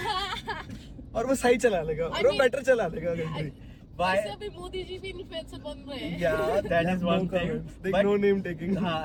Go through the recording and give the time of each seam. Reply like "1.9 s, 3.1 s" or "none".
none